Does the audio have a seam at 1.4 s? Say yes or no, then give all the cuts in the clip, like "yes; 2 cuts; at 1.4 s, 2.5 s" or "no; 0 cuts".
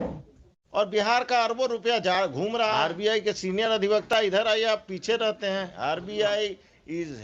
no; 2 cuts; at 2.9 s, 5.7 s